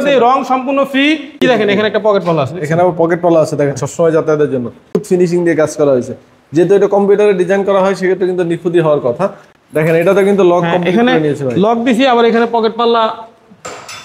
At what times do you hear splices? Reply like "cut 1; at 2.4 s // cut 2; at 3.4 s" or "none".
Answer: cut 1; at 1.4 s // cut 2; at 5.0 s // cut 3; at 9.5 s